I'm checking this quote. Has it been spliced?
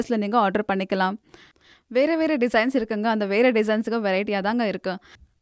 no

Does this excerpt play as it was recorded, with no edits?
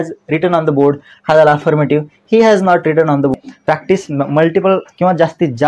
no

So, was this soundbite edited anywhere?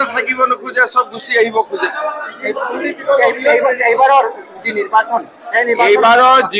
no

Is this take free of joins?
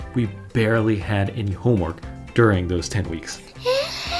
yes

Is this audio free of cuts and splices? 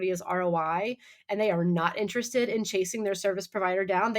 yes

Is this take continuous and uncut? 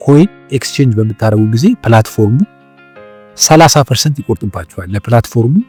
yes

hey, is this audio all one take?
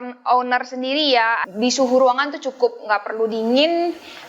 no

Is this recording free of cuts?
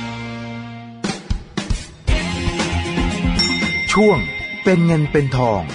no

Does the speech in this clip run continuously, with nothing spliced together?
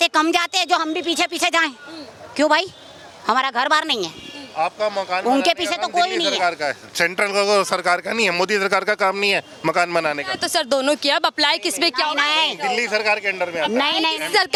yes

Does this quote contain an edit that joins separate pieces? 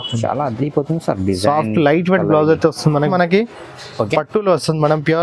yes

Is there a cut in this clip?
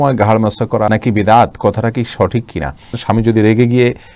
yes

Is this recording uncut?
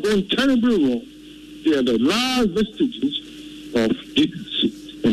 yes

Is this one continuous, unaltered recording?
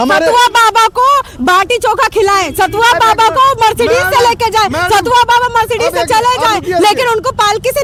yes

